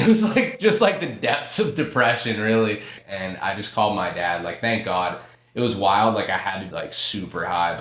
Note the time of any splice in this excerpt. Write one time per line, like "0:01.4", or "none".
0:03.0
0:06.6